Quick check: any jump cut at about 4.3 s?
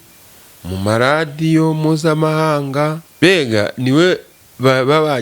no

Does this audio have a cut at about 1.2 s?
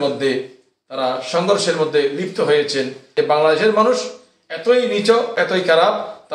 no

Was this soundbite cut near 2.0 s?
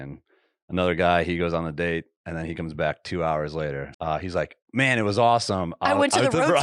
no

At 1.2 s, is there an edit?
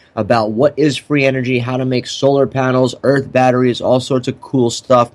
no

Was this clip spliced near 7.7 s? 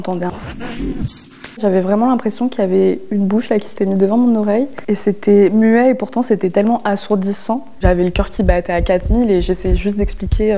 yes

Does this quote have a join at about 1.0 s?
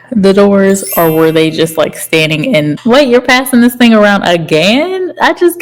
no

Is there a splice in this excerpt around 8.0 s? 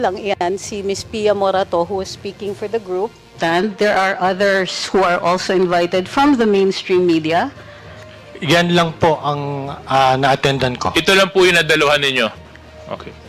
yes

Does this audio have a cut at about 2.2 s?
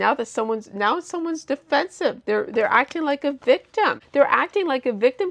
no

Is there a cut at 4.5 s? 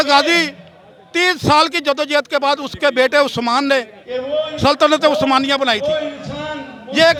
no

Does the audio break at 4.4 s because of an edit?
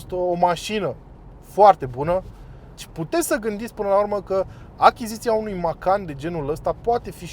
no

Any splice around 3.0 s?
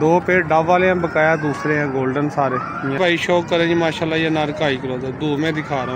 yes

